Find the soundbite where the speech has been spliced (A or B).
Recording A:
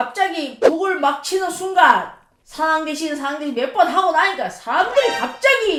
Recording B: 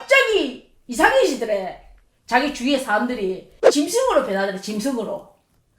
B